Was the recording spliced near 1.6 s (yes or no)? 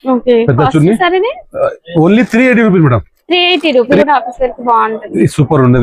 no